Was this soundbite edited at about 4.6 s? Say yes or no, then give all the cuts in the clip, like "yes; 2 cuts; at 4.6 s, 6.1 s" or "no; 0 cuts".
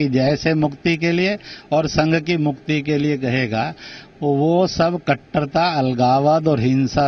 no; 0 cuts